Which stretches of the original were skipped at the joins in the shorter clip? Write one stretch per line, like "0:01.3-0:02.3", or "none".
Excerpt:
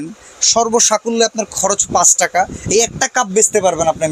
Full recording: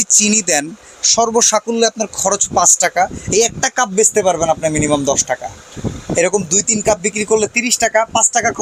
none